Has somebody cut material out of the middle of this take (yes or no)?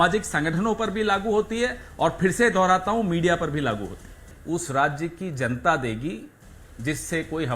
yes